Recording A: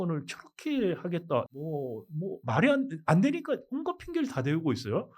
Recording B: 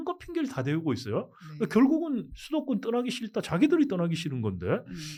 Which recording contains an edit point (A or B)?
A